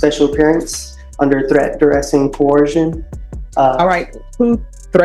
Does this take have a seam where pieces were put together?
no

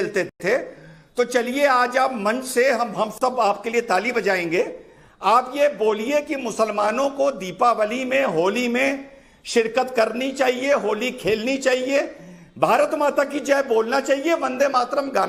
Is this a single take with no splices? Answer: yes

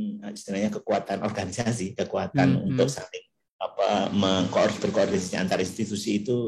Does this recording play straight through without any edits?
yes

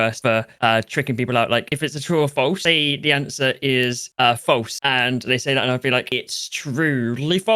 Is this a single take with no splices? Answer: yes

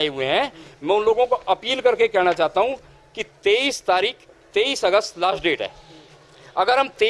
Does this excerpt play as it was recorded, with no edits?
yes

